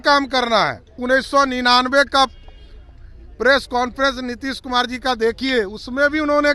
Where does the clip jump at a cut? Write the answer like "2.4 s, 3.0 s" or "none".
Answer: 1.0 s

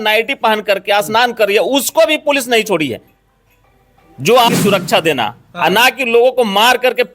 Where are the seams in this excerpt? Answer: 4.5 s

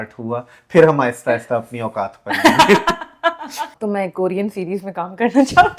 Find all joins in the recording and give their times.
3.7 s

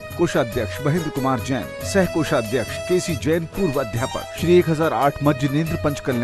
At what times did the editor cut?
2.8 s, 4.3 s

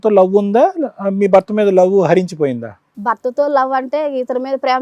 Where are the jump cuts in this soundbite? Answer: none

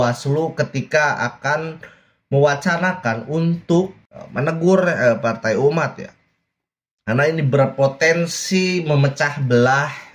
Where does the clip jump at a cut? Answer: none

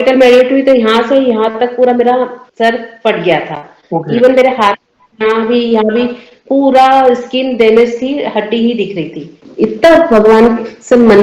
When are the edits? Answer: 9.4 s

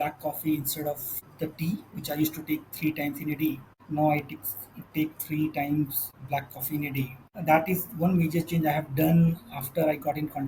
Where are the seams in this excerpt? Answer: none

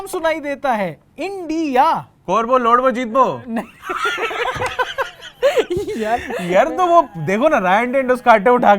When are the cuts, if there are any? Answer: none

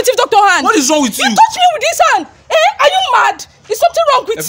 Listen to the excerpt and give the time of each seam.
none

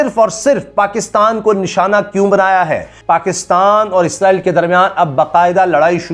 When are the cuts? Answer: 2.9 s

